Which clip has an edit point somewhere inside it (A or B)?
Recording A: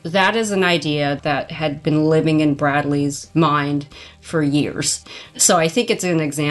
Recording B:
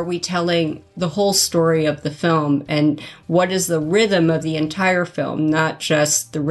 A